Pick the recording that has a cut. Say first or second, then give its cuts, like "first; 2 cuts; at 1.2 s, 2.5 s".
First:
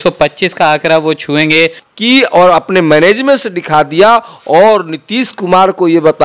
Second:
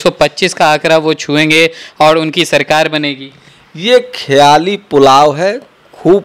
first; 1 cut; at 1.8 s